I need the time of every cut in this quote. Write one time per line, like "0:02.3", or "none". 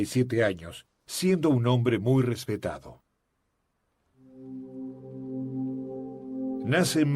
0:01.8